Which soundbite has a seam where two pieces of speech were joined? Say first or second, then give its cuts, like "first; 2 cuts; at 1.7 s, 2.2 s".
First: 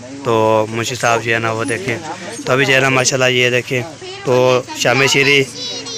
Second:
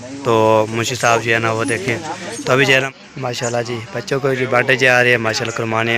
second; 1 cut; at 2.9 s